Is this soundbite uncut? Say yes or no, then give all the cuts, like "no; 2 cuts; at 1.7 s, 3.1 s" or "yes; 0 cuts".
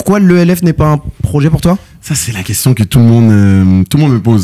yes; 0 cuts